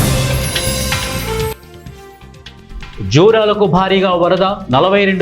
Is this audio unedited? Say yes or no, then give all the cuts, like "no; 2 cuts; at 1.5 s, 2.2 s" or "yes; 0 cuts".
no; 1 cut; at 1.6 s